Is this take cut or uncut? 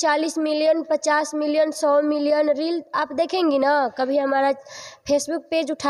uncut